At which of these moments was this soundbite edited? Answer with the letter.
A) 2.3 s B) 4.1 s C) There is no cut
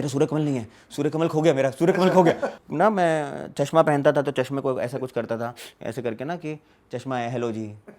A